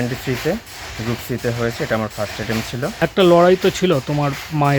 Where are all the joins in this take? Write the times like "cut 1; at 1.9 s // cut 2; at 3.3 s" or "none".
cut 1; at 3.0 s